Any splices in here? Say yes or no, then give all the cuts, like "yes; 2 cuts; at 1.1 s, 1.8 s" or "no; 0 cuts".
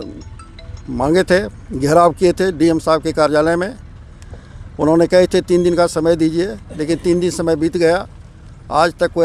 no; 0 cuts